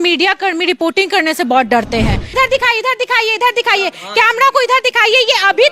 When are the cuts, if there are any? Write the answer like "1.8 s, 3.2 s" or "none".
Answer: 2.3 s